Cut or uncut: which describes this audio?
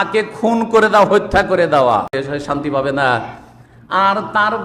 cut